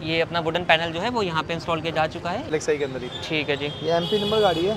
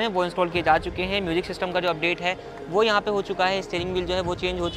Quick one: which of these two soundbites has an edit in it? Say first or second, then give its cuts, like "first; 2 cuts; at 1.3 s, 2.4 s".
first; 1 cut; at 2.5 s